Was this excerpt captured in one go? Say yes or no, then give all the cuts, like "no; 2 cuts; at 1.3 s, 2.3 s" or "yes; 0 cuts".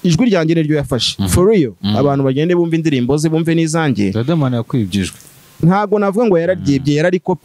yes; 0 cuts